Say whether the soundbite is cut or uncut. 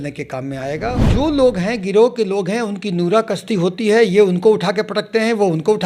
cut